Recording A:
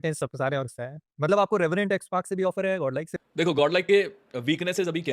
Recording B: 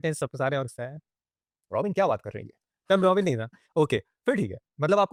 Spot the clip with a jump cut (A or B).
A